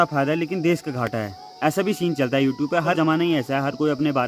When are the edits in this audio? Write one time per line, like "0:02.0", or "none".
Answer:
0:03.0

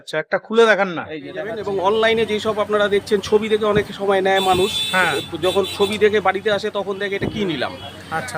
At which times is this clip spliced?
0:01.6

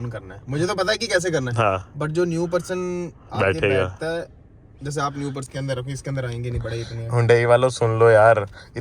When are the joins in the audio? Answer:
0:05.5

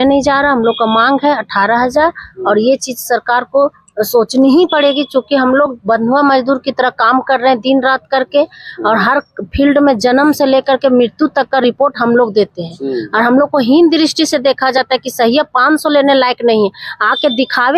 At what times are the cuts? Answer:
none

